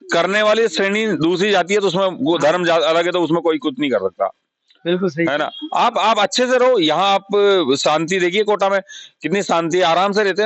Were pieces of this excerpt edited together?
no; 0 cuts

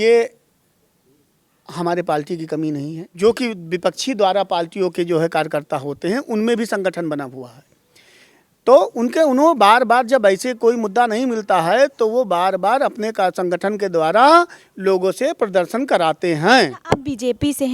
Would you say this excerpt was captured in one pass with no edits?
no; 2 cuts; at 3.0 s, 16.8 s

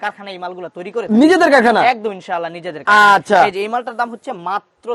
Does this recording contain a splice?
no; 0 cuts

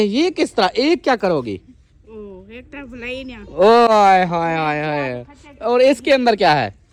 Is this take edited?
no; 0 cuts

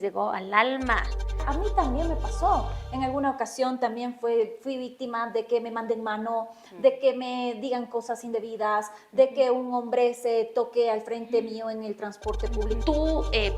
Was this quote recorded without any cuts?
no; 2 cuts; at 1.4 s, 12.8 s

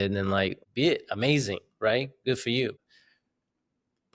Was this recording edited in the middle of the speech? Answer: no; 0 cuts

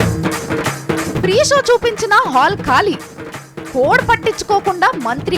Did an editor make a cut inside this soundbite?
no; 0 cuts

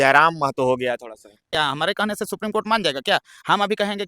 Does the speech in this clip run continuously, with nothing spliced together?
no; 1 cut; at 1.5 s

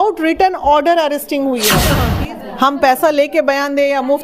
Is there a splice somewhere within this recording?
yes; 1 cut; at 2.1 s

